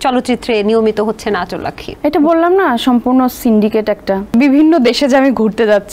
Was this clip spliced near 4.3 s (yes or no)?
yes